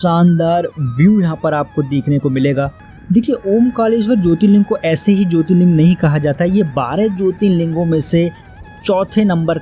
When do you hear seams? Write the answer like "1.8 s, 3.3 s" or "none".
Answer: 2.9 s